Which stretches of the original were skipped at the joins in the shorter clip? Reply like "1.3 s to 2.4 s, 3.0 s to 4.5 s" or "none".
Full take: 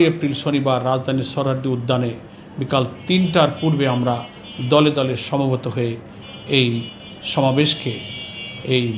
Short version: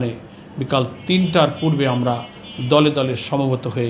none